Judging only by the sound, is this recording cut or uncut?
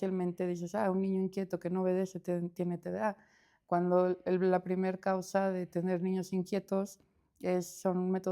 uncut